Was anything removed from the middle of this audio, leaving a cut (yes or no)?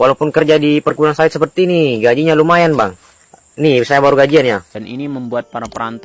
yes